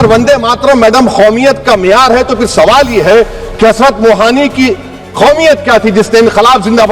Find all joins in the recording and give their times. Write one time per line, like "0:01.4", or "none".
none